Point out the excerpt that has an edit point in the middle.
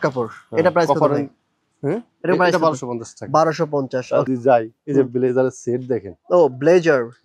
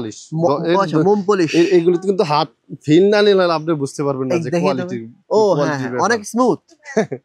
first; 1 cut; at 4.3 s

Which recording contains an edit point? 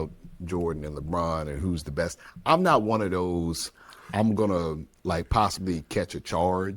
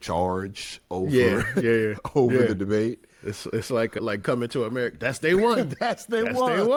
first; 1 cut; at 4.1 s

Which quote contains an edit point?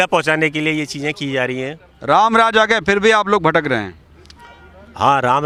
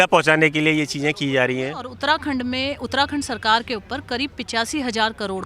second; 1 cut; at 1.9 s

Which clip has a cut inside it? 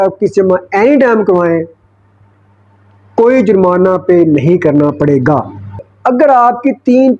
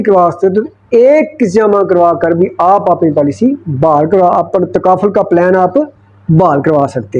first; 1 cut; at 5.9 s

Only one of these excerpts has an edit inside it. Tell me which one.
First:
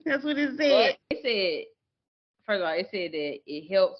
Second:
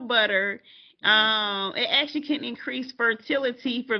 first; 1 cut; at 1.2 s

